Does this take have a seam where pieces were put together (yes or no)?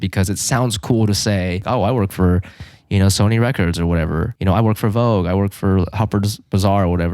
yes